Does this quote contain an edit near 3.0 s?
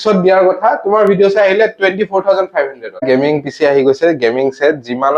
yes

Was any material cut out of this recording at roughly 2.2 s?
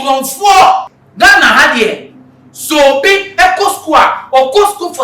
no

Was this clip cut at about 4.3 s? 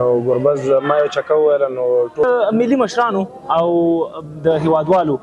no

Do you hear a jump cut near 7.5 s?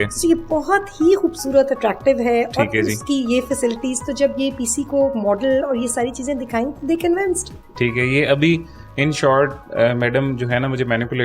no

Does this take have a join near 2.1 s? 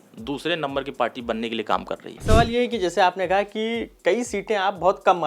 yes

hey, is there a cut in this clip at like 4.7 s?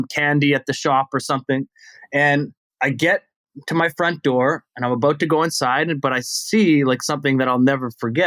no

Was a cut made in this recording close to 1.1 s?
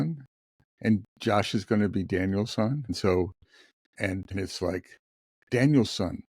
no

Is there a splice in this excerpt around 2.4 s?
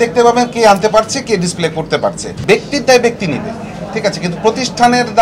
yes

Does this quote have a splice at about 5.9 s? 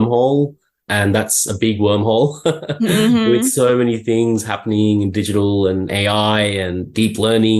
yes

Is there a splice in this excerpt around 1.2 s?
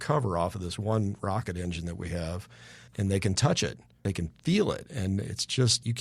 no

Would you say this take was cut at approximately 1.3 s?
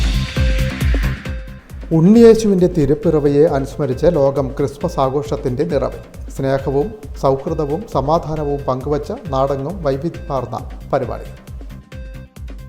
yes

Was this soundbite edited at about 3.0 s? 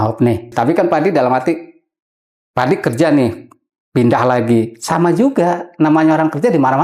no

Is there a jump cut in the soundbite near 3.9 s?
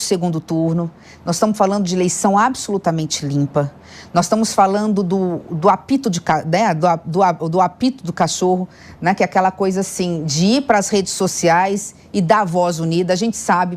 no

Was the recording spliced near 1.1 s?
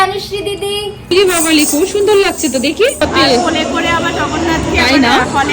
yes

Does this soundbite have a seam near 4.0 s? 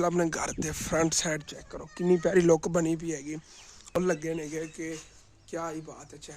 yes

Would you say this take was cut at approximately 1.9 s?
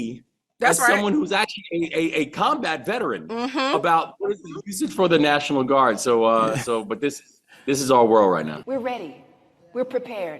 no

